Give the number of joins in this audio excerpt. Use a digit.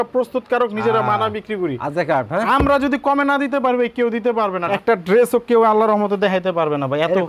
1